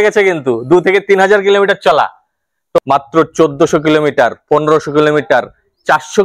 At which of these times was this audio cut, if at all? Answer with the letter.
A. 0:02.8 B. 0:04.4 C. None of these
A